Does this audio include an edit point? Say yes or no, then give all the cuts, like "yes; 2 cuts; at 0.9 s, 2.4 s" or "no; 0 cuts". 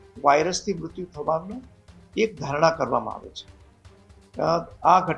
no; 0 cuts